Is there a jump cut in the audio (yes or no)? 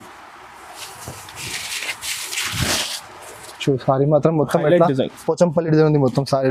no